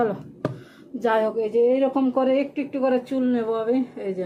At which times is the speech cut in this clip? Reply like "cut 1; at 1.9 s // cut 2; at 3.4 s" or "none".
none

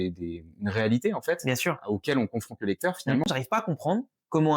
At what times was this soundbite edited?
cut 1; at 3.2 s

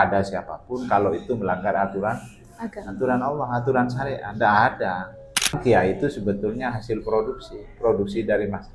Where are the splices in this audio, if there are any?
cut 1; at 5.6 s

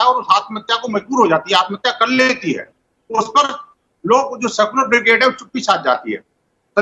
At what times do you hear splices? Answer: none

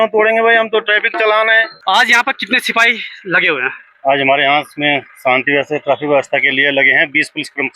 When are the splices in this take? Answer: cut 1; at 1.7 s

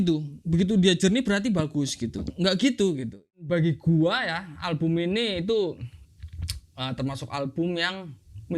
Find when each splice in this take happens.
cut 1; at 3.5 s

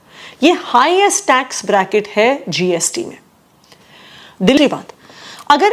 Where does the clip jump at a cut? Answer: cut 1; at 4.6 s

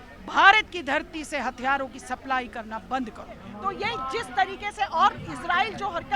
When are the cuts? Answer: cut 1; at 3.5 s

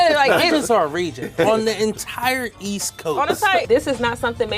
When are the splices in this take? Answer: cut 1; at 3.7 s

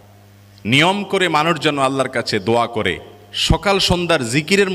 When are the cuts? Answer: none

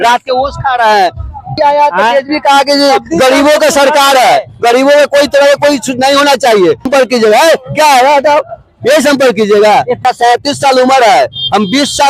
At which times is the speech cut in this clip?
cut 1; at 1.6 s // cut 2; at 6.9 s // cut 3; at 10.0 s

